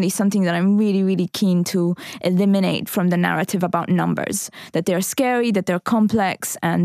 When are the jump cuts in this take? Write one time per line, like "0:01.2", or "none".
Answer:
0:02.9